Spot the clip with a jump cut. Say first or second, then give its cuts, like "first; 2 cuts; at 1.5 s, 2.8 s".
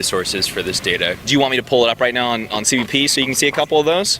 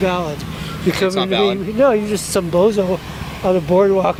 first; 1 cut; at 1.2 s